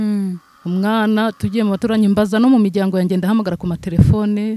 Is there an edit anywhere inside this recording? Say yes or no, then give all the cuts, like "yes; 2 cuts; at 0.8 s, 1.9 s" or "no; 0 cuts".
no; 0 cuts